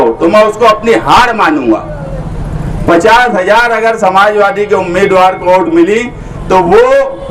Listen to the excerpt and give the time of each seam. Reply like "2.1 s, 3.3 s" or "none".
none